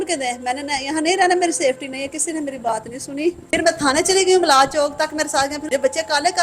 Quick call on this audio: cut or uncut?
cut